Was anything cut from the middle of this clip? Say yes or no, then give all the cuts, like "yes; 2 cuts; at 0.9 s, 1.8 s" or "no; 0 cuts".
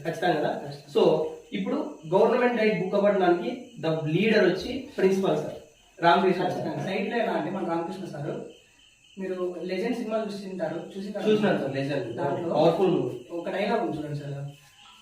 yes; 1 cut; at 6.9 s